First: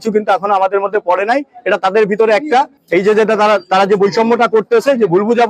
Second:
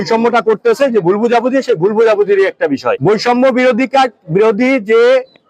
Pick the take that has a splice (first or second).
second